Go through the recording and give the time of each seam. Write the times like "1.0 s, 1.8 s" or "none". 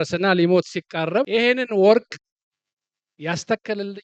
1.3 s